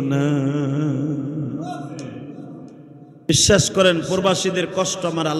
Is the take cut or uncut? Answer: cut